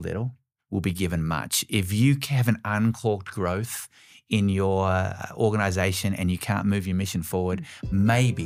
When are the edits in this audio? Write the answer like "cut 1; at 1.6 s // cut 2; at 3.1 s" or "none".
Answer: none